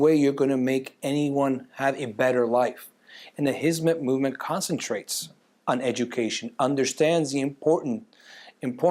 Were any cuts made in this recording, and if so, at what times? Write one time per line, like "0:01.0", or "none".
none